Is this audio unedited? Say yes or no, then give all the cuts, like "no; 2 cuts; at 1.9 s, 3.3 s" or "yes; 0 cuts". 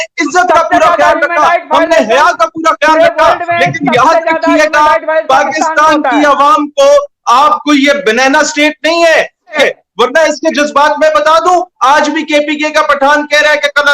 no; 1 cut; at 9.6 s